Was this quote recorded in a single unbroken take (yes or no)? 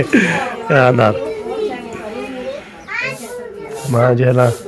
no